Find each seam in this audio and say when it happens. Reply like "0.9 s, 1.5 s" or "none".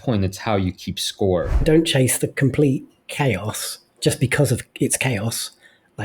1.6 s

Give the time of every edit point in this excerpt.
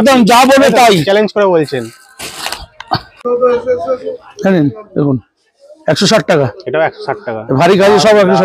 3.2 s

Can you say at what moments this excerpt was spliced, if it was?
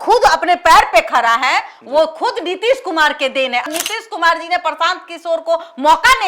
3.7 s

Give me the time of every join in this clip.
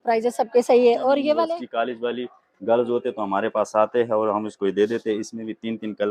1.4 s

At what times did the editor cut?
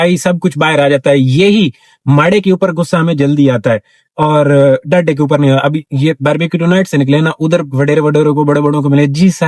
none

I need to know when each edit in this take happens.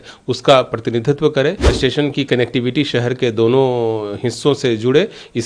1.7 s

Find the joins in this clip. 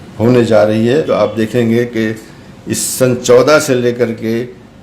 1.1 s

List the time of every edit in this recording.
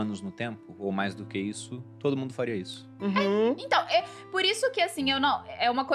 none

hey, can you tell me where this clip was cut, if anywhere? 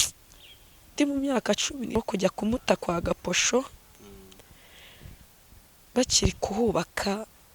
1.9 s

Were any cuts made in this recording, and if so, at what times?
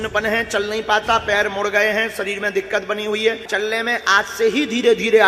3.5 s

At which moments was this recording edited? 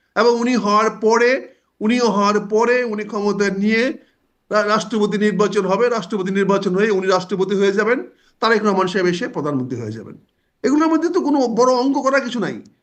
none

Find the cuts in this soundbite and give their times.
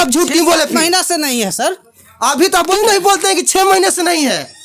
2.7 s

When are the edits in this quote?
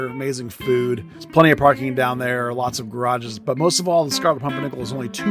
1.2 s

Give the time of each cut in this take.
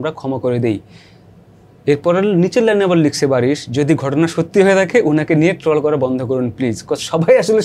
none

